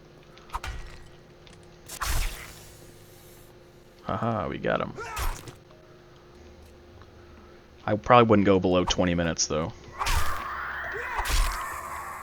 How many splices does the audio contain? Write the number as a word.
one